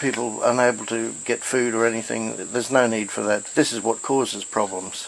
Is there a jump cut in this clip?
yes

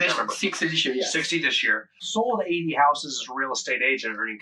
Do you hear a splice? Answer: yes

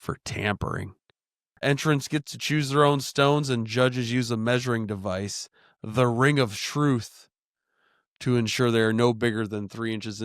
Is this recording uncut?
no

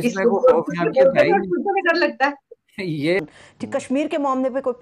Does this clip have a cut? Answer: yes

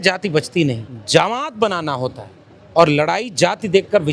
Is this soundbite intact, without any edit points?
no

